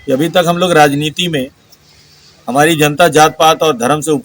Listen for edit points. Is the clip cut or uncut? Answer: uncut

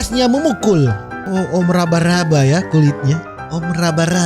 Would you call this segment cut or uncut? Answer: cut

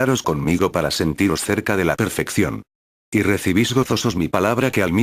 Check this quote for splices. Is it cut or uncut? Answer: cut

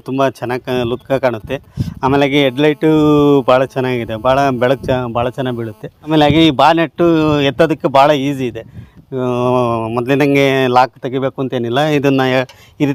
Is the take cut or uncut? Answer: uncut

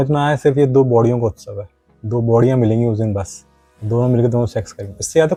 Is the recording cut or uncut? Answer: uncut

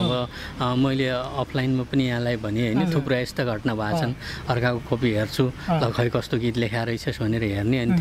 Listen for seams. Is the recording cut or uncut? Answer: uncut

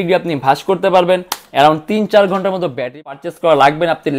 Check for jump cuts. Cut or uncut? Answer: cut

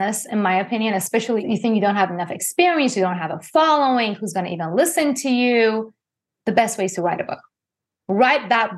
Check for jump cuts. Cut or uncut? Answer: cut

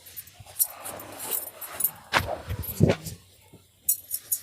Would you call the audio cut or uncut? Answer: uncut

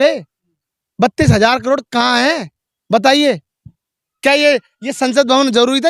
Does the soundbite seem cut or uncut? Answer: uncut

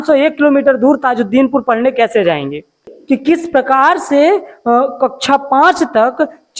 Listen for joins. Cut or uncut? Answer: cut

